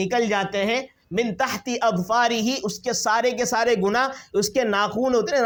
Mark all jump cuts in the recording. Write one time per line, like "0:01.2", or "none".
none

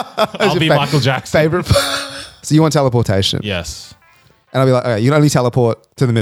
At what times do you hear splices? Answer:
0:02.3

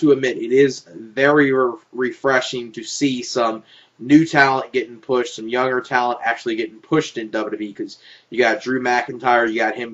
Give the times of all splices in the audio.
0:01.8

